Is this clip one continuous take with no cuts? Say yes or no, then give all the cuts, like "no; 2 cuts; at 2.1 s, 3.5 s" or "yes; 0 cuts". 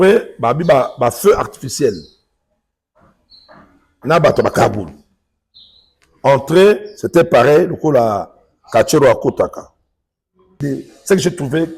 no; 1 cut; at 10.6 s